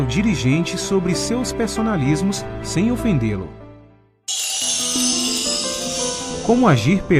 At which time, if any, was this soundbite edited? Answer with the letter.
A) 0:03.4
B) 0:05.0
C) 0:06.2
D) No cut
A